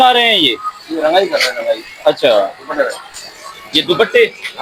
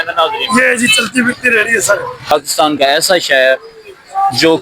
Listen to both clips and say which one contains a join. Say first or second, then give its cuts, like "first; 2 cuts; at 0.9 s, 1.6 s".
second; 1 cut; at 2.3 s